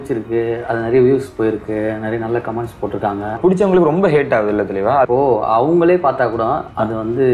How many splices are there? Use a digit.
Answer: 2